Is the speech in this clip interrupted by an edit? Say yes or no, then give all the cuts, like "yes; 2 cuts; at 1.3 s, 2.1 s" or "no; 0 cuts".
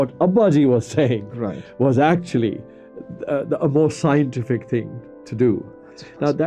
no; 0 cuts